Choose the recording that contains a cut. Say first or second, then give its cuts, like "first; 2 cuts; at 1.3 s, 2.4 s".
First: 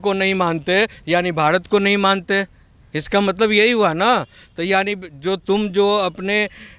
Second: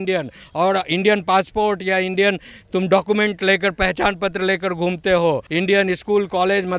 second; 1 cut; at 5.5 s